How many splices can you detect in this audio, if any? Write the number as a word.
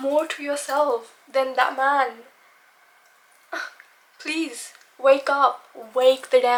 zero